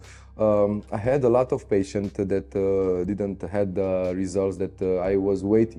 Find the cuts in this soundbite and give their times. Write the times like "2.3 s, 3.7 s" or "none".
none

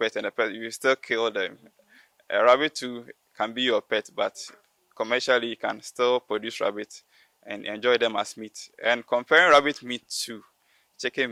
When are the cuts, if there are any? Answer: none

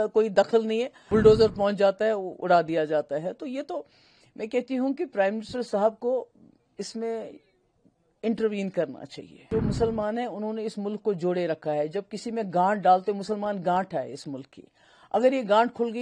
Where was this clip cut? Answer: 0.9 s, 9.5 s

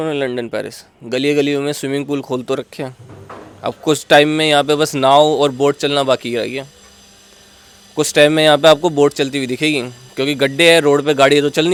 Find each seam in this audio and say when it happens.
none

